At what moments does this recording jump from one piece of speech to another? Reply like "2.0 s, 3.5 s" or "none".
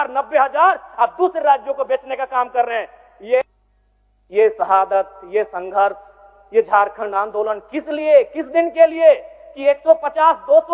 3.4 s